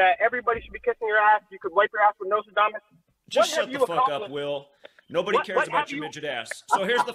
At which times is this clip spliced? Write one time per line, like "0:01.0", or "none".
none